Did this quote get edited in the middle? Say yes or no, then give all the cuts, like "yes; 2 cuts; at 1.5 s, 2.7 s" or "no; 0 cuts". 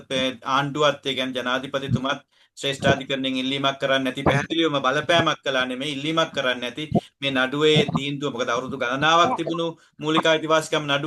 no; 0 cuts